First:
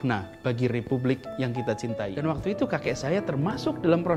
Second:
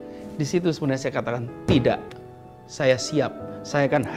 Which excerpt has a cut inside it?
first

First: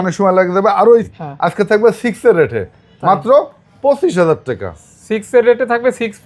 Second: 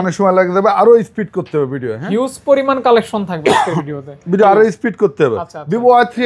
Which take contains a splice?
first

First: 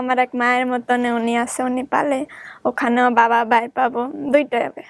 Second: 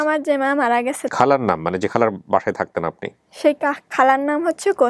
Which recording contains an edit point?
second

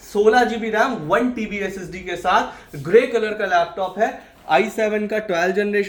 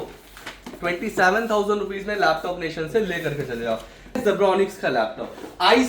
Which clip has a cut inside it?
second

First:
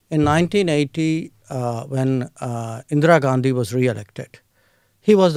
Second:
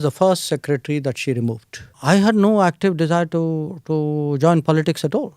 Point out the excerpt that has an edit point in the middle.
second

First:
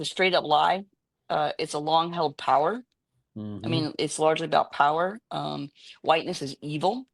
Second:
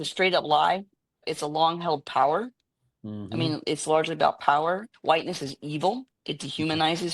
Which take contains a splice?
second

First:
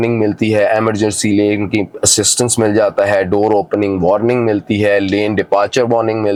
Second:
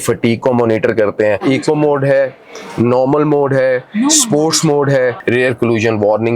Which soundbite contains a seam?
second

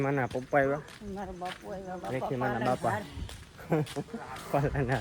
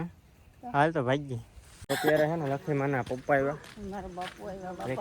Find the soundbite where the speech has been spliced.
second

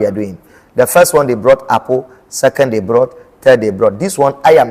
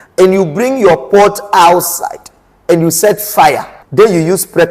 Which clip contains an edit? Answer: second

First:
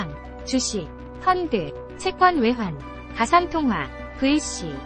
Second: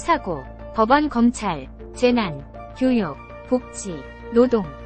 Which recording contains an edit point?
second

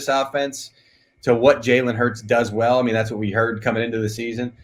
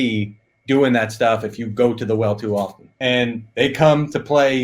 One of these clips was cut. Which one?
second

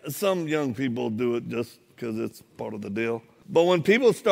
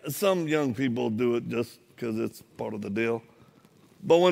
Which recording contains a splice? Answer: first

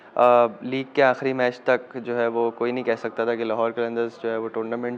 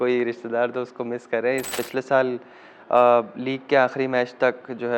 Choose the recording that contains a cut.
second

